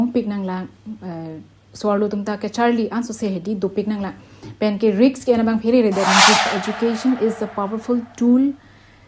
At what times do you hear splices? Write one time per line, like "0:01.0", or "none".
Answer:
0:06.5